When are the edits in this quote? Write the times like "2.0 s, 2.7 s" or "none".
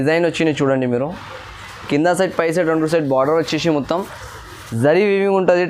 none